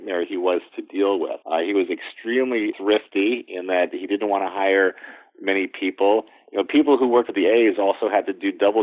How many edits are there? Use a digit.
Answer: 3